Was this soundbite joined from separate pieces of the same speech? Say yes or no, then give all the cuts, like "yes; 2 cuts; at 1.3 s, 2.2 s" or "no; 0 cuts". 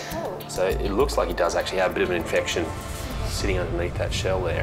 no; 0 cuts